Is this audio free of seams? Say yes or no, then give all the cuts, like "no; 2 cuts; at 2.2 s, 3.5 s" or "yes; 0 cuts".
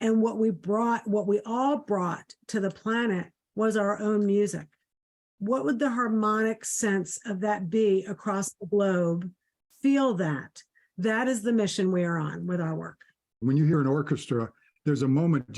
no; 2 cuts; at 13.4 s, 14.6 s